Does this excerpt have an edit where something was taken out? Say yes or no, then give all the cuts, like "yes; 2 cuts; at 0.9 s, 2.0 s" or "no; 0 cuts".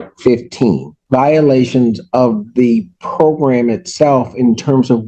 yes; 1 cut; at 0.9 s